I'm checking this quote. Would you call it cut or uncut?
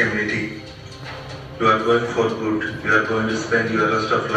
uncut